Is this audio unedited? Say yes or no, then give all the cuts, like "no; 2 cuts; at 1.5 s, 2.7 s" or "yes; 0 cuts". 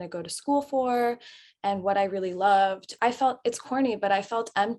no; 1 cut; at 2.9 s